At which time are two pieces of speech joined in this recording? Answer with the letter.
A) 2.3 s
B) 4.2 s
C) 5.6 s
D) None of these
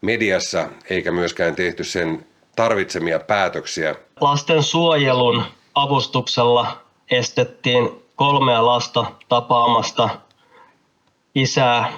B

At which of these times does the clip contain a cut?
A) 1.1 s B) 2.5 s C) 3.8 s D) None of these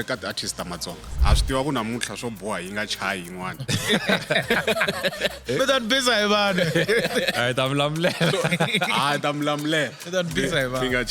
A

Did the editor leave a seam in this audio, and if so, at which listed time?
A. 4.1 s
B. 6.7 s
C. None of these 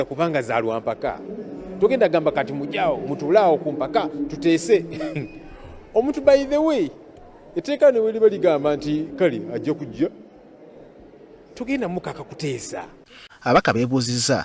A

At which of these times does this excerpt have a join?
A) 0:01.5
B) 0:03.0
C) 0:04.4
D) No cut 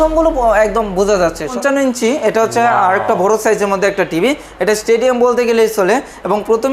A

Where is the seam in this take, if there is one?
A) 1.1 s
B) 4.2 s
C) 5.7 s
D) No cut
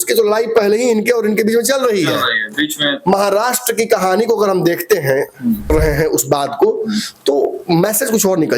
C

